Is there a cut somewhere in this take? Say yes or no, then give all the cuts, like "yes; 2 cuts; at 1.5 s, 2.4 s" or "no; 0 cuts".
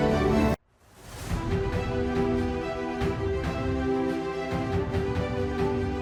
no; 0 cuts